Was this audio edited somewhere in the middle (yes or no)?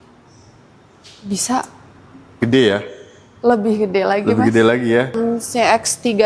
yes